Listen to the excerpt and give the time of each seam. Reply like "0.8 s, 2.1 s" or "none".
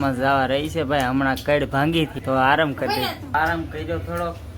2.2 s, 3.3 s